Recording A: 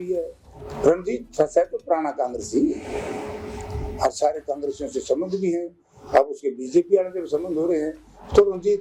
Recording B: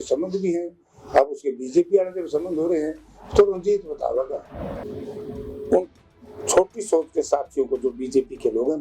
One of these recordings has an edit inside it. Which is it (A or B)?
B